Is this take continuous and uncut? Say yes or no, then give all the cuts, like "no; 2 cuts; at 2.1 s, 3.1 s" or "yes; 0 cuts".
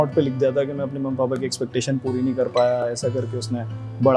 yes; 0 cuts